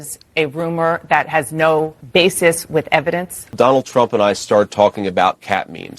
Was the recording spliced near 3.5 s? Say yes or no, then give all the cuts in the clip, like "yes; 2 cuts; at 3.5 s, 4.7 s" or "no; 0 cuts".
yes; 1 cut; at 3.5 s